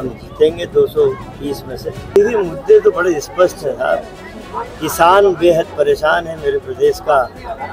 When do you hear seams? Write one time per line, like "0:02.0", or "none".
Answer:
0:02.2